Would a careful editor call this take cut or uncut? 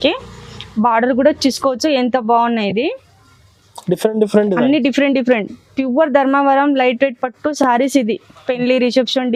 uncut